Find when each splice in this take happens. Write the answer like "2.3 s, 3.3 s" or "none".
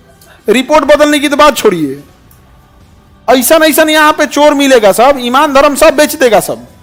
none